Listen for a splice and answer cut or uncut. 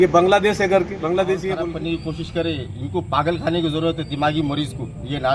cut